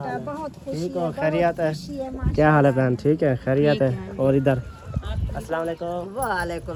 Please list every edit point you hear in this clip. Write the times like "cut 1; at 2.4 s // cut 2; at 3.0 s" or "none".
none